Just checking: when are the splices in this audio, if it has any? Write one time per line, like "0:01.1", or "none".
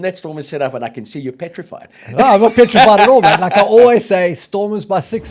none